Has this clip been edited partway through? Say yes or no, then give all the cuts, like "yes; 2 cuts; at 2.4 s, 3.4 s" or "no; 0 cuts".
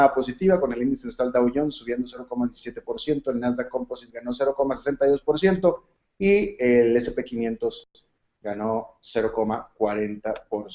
no; 0 cuts